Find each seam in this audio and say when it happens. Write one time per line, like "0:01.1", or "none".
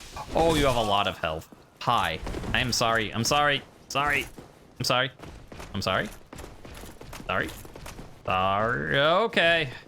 0:08.1